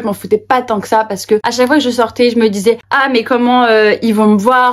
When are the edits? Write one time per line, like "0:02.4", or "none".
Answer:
0:01.5
0:02.9